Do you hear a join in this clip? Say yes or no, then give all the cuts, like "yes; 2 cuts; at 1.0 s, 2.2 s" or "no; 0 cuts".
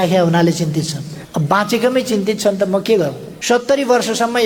yes; 2 cuts; at 1.1 s, 3.4 s